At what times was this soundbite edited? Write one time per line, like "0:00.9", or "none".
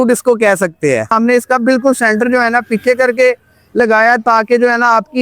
0:01.1